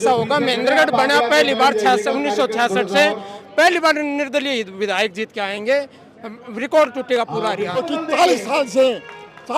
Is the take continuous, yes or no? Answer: no